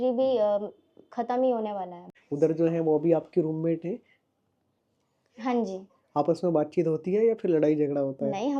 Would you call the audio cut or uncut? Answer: cut